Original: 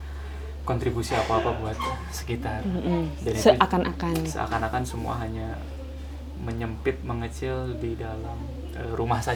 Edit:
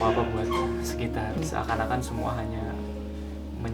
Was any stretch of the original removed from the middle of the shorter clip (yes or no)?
yes